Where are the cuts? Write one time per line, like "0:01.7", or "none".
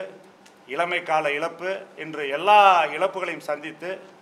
none